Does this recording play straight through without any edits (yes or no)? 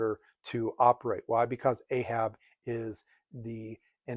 yes